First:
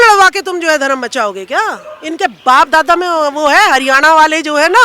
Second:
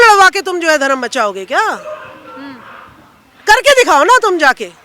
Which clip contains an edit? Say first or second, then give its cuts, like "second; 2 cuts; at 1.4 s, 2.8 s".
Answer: first; 1 cut; at 1.9 s